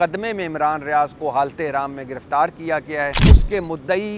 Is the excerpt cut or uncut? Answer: cut